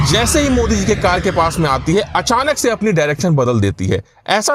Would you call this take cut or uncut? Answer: uncut